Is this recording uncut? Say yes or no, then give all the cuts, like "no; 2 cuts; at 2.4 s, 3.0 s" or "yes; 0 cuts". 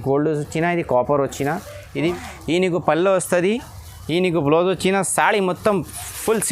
no; 1 cut; at 2.1 s